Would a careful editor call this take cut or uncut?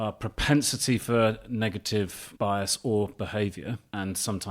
cut